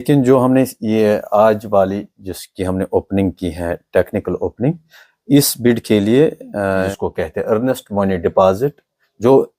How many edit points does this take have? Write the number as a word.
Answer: one